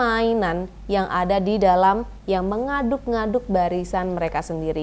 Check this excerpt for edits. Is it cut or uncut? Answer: uncut